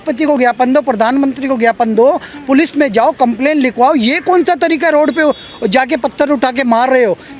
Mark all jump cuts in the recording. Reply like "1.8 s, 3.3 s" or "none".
none